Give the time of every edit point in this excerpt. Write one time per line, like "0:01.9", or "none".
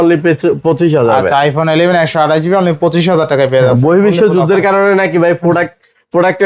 none